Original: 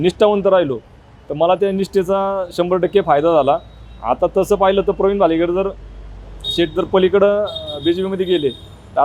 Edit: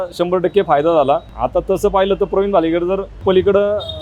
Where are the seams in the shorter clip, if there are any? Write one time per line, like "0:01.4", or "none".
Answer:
0:01.3
0:03.2